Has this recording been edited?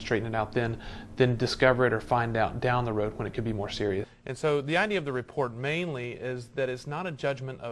yes; 1 cut; at 4.2 s

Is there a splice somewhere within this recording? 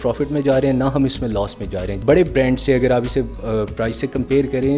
yes; 1 cut; at 1.9 s

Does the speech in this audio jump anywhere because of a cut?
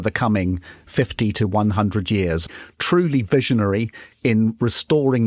yes; 1 cut; at 2.4 s

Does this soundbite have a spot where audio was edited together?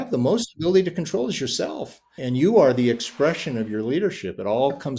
yes; 1 cut; at 2.2 s

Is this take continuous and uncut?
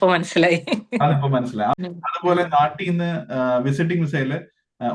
no; 1 cut; at 1.8 s

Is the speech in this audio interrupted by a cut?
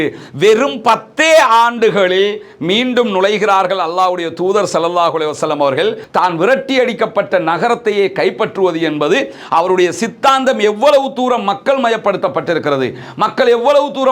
yes; 1 cut; at 6.0 s

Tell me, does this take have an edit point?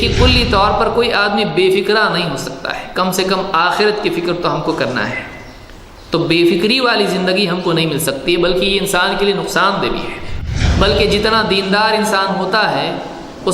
yes; 1 cut; at 10.7 s

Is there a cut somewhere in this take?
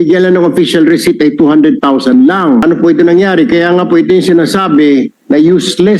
yes; 1 cut; at 2.6 s

